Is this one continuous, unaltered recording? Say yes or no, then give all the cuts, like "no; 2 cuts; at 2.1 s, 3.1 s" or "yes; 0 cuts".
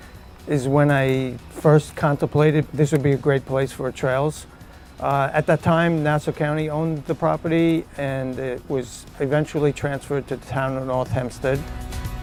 yes; 0 cuts